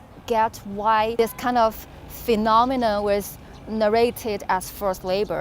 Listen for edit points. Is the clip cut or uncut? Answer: cut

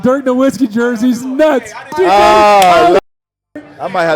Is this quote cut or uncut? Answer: cut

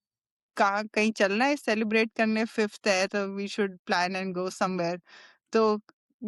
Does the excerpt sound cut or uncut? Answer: uncut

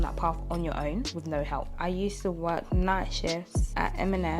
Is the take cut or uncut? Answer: cut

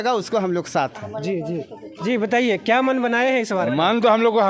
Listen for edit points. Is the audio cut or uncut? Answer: uncut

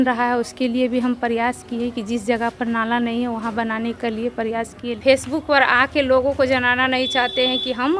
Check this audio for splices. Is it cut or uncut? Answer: cut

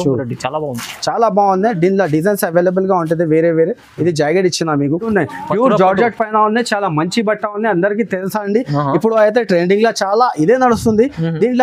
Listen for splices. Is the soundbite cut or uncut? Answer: cut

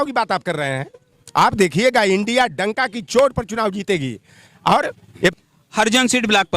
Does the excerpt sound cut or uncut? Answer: cut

